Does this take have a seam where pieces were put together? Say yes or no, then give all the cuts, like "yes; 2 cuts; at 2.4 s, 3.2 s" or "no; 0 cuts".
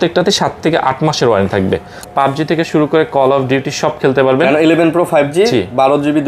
yes; 1 cut; at 2.0 s